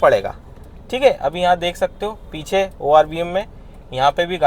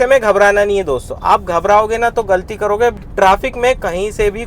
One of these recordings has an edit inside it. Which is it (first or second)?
second